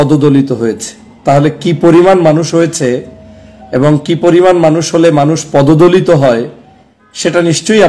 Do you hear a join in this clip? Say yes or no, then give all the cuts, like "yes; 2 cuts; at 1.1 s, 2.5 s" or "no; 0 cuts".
no; 0 cuts